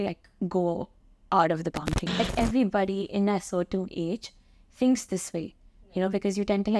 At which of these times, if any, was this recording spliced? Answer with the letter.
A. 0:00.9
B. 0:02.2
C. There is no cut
B